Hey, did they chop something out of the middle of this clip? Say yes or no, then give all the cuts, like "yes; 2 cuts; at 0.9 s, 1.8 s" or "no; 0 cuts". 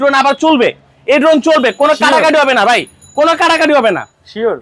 no; 0 cuts